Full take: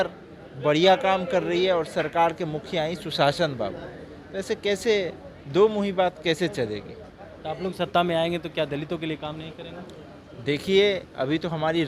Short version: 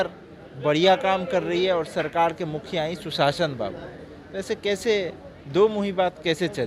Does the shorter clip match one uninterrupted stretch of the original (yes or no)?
yes